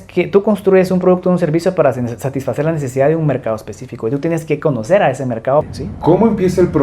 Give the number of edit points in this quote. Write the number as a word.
one